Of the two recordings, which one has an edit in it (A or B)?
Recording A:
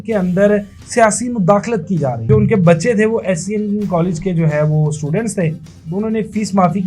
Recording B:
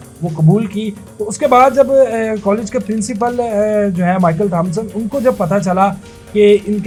A